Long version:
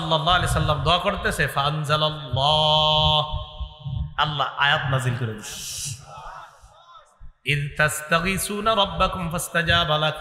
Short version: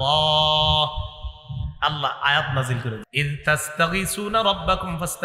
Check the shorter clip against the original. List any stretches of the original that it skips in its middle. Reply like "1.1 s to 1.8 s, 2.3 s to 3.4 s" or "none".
5.4 s to 7.4 s